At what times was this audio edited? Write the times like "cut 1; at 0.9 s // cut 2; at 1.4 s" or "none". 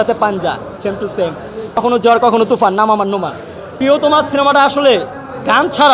cut 1; at 1.8 s // cut 2; at 3.7 s

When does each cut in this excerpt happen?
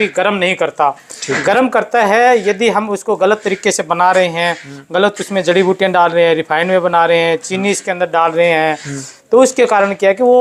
none

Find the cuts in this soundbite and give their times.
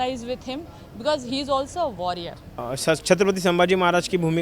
cut 1; at 2.4 s

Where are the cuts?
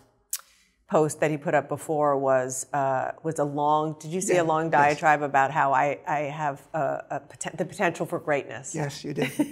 none

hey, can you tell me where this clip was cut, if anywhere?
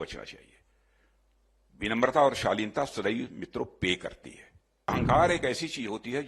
cut 1; at 4.9 s

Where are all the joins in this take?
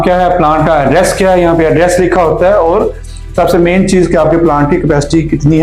none

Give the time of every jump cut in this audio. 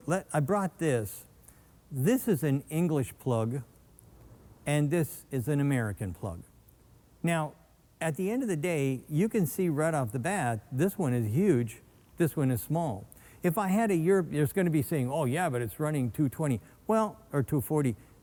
none

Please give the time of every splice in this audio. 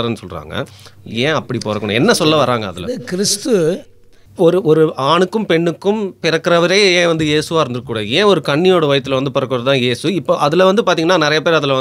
cut 1; at 4.2 s

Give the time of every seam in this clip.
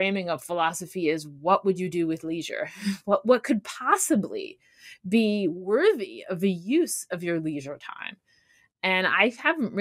none

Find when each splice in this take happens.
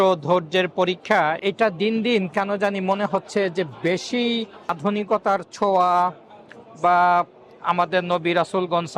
cut 1; at 1.4 s // cut 2; at 4.8 s

